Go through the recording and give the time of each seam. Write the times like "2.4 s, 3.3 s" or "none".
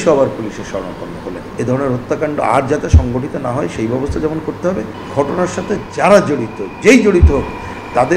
1.5 s, 5.0 s